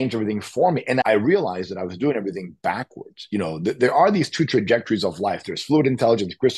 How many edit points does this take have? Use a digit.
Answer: 1